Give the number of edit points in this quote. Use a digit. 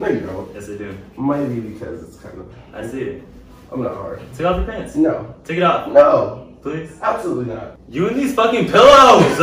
0